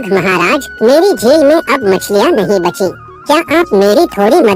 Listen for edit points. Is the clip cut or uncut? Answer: uncut